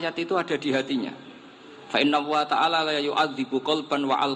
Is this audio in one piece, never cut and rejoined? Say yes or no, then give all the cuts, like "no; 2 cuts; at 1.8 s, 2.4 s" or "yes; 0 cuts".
yes; 0 cuts